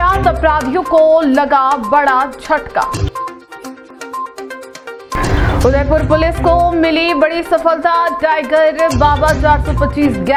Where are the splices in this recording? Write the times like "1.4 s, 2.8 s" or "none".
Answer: none

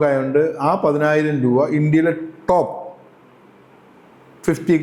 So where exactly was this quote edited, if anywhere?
none

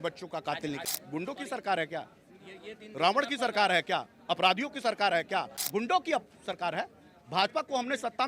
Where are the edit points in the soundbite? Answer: 0.8 s, 5.6 s

